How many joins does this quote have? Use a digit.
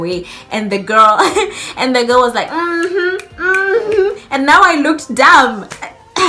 0